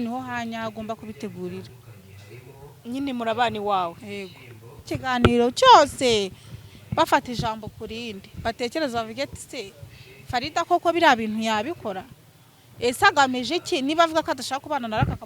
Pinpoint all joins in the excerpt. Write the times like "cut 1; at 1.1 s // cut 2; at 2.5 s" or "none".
cut 1; at 4.9 s